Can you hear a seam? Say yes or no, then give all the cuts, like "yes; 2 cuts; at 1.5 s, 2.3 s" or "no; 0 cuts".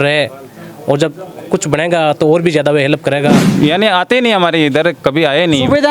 yes; 1 cut; at 3.4 s